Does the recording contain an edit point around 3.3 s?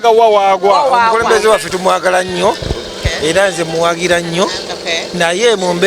no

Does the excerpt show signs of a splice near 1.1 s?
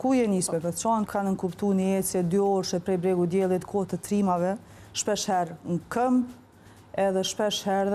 yes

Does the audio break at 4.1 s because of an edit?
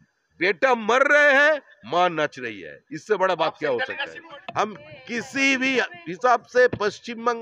yes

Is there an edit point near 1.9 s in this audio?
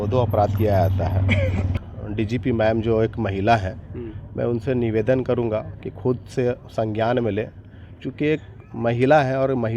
yes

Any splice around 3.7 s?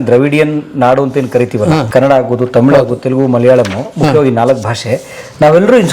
no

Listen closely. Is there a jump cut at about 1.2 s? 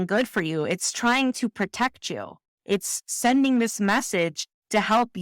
no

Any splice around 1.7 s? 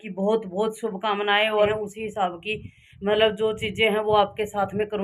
yes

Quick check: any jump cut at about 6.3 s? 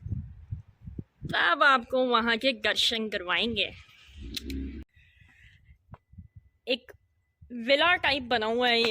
no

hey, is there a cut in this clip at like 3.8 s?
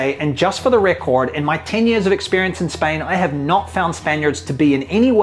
no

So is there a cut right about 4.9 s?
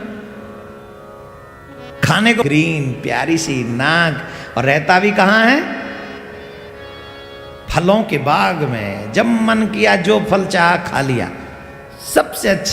no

